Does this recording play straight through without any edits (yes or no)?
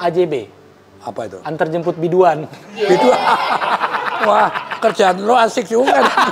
yes